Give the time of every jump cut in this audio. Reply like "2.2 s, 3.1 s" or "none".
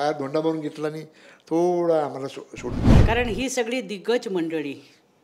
2.8 s